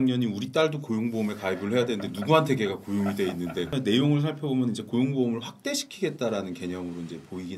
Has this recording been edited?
yes; 1 cut; at 3.7 s

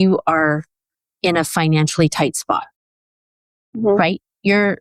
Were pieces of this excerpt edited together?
no; 0 cuts

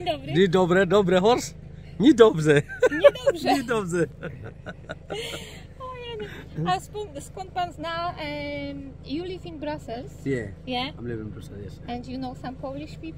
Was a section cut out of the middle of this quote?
no; 0 cuts

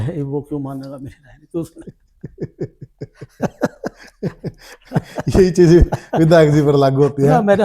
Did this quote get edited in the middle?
no; 0 cuts

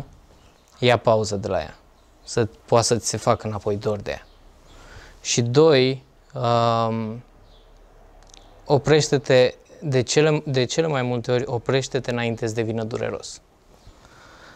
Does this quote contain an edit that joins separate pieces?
no; 0 cuts

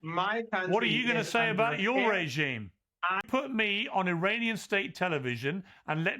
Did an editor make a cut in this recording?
yes; 1 cut; at 3.2 s

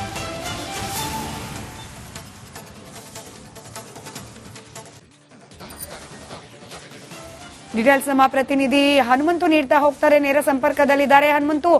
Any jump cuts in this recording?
no; 0 cuts

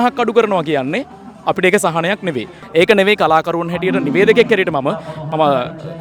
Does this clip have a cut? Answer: yes; 1 cut; at 2.5 s

